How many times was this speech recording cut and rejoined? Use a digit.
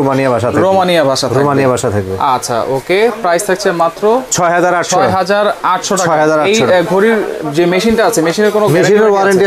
0